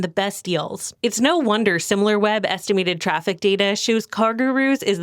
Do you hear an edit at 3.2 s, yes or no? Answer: no